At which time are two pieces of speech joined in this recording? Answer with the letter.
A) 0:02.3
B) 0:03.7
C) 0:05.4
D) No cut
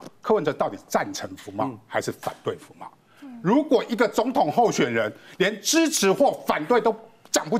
D